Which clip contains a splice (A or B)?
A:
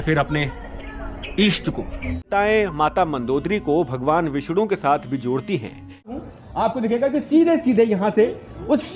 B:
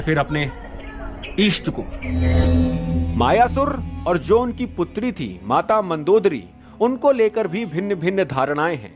A